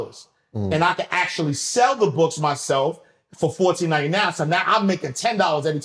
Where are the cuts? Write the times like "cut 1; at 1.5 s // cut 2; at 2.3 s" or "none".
none